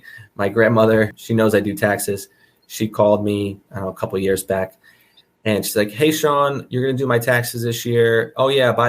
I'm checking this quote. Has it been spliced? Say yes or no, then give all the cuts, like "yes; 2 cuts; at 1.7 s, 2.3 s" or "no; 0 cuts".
yes; 1 cut; at 1.2 s